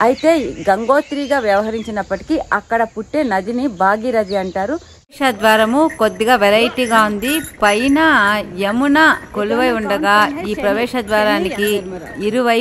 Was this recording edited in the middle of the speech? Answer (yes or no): yes